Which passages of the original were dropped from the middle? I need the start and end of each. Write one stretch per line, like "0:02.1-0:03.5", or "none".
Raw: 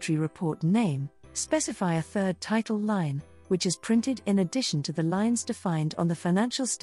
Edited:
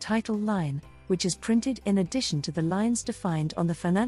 none